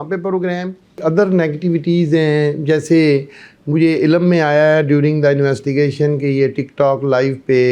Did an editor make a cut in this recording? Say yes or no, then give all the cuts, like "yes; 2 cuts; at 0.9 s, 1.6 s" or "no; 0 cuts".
yes; 1 cut; at 1.0 s